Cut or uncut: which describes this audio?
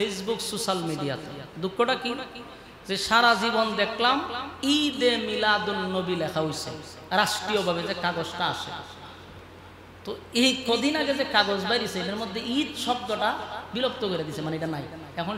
uncut